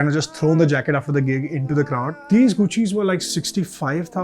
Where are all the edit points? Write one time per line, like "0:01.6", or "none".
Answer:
0:02.2